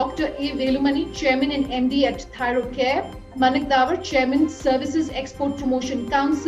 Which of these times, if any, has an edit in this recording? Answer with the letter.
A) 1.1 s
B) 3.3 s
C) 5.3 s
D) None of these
B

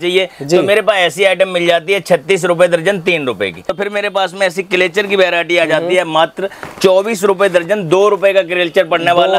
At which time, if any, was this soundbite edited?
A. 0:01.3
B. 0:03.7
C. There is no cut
B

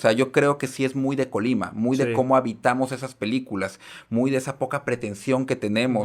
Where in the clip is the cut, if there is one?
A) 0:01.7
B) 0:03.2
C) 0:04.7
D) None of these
D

